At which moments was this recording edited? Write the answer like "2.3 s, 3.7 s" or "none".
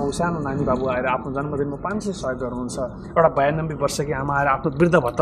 none